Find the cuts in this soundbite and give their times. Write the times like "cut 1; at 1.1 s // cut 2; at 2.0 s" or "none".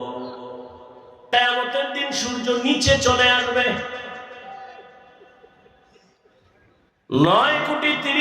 cut 1; at 1.3 s